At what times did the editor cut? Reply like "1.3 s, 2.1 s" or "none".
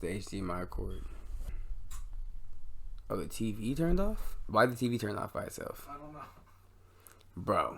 1.5 s